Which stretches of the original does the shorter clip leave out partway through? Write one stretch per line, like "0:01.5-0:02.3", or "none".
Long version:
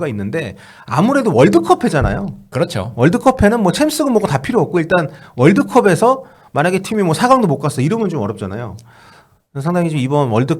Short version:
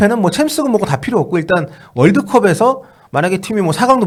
none